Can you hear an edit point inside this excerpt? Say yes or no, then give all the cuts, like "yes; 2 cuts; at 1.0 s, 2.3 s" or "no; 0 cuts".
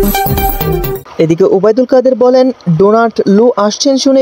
yes; 1 cut; at 1.0 s